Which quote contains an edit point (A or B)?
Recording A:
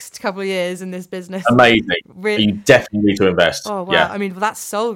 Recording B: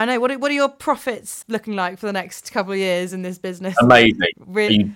B